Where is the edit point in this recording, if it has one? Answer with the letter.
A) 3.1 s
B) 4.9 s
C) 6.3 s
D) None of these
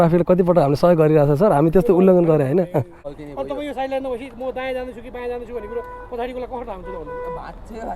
A